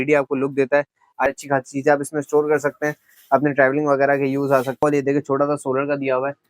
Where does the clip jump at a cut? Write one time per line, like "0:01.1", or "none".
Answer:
0:01.3
0:04.8